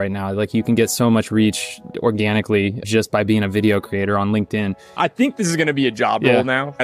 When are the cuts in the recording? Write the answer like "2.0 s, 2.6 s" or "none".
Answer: 4.9 s